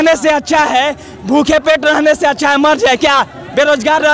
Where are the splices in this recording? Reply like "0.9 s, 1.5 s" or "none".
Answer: none